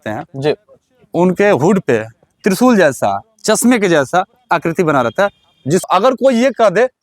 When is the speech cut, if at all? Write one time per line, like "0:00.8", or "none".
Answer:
0:05.9